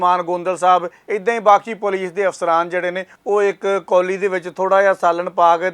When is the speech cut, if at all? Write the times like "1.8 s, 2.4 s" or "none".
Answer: 1.0 s, 3.1 s